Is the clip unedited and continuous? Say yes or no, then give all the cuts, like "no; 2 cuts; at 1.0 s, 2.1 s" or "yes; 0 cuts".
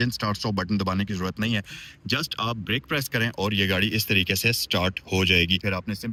yes; 0 cuts